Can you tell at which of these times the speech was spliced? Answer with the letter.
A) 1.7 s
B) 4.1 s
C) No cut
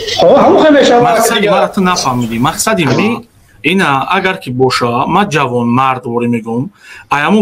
A